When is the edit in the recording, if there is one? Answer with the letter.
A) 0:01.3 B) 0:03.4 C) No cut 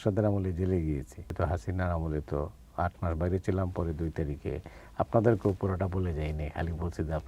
A